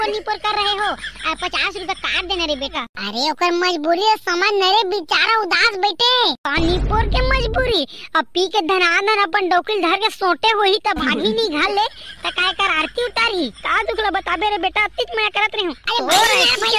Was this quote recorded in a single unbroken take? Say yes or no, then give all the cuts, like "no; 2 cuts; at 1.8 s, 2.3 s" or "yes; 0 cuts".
no; 1 cut; at 2.9 s